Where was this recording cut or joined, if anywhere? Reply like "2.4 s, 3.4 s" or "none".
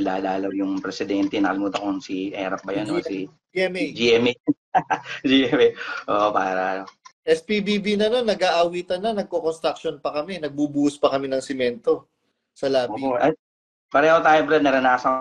7.1 s

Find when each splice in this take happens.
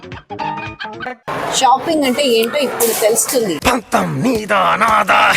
1.2 s

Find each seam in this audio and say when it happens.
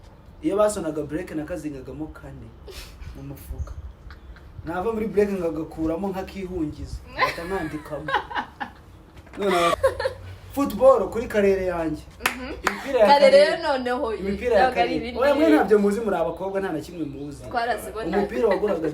9.7 s

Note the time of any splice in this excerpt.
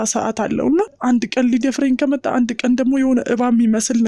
0.9 s

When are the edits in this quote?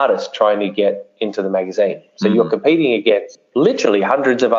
3.4 s

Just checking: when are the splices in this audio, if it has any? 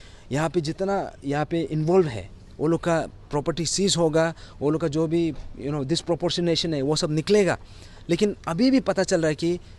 none

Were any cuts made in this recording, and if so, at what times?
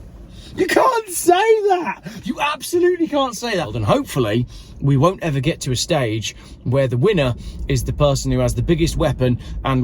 3.7 s

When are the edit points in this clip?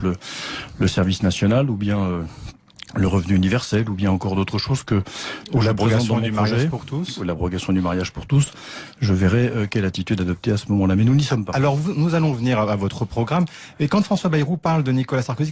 none

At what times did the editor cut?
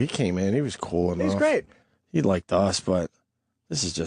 1.8 s

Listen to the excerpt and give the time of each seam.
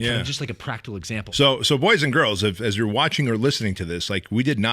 1.2 s

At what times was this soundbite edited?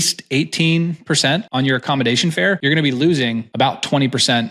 1.5 s, 2.6 s, 3.5 s

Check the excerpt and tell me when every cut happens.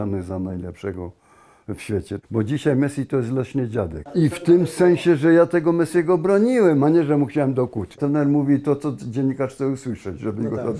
2.1 s, 4.0 s, 8.0 s

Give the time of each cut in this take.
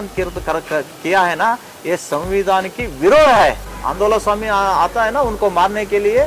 3.6 s

